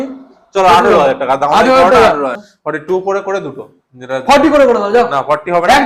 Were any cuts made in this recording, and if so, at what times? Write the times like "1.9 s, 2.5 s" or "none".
2.5 s